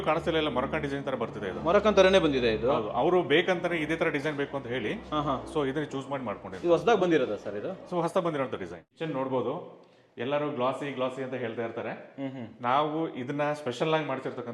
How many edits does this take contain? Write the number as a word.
one